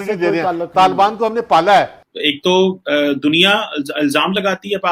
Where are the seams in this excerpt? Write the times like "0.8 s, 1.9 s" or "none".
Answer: 2.0 s